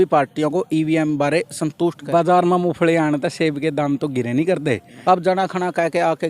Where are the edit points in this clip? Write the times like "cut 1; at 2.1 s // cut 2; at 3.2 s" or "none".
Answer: cut 1; at 2.0 s // cut 2; at 4.9 s